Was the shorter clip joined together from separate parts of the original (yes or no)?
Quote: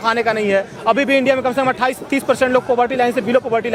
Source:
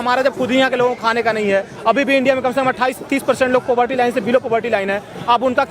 no